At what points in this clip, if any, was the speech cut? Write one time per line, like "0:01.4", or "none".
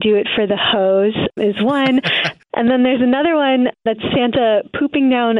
0:02.4